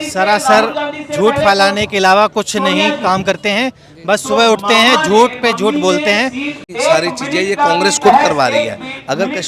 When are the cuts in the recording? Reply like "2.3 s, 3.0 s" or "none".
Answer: 6.6 s